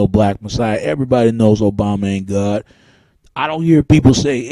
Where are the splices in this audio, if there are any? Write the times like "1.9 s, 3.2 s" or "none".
1.8 s